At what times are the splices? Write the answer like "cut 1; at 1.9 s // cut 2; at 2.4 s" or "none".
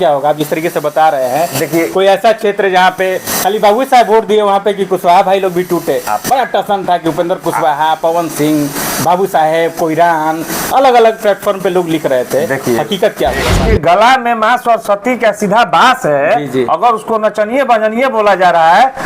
cut 1; at 13.6 s